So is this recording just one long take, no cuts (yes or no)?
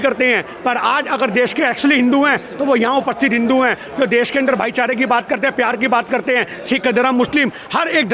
yes